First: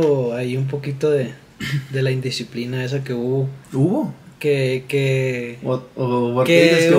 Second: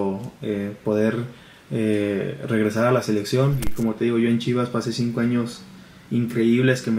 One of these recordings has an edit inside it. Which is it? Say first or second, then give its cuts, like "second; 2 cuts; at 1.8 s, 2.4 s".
second; 1 cut; at 3.7 s